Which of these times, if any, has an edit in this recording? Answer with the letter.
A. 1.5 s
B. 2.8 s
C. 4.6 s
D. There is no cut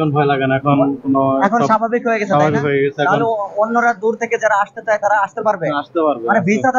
D